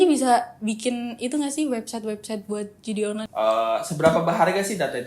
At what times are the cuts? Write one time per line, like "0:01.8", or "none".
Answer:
0:03.2